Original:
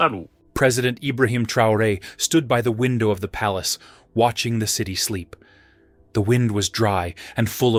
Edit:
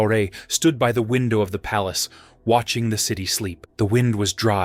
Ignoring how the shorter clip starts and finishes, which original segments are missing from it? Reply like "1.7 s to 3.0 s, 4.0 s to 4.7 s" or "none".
5.3 s to 5.9 s